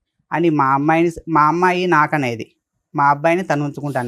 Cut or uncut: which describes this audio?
uncut